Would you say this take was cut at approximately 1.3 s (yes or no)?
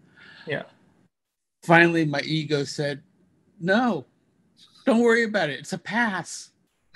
no